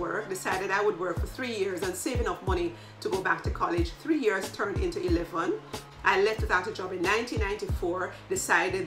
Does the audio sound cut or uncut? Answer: cut